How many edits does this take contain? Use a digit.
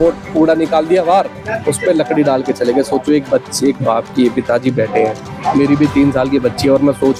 0